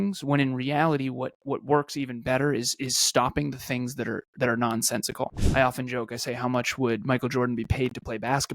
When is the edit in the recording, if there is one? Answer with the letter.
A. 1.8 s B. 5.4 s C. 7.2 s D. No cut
B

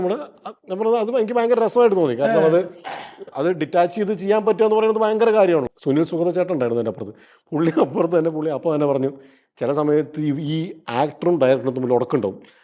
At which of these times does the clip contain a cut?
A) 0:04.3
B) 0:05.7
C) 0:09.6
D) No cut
B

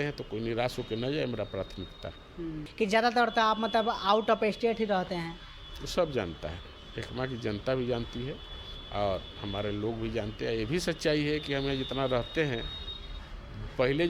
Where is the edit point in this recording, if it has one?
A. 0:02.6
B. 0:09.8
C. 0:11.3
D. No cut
A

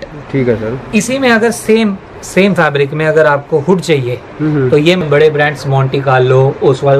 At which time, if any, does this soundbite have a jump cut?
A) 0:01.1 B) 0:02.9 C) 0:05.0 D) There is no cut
C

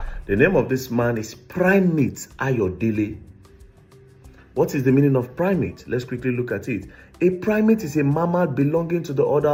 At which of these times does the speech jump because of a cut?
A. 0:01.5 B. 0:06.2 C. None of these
C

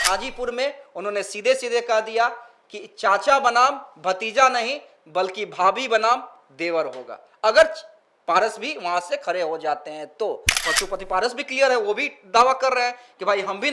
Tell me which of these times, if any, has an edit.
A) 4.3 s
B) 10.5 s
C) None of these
B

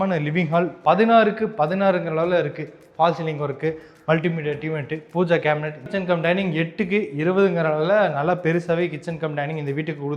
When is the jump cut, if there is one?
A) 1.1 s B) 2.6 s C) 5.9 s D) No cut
C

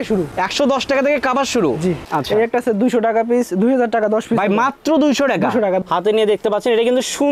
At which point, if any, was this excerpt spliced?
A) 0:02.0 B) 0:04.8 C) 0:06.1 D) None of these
A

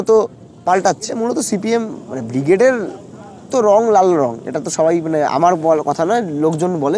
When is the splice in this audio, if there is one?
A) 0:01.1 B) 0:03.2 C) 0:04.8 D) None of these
A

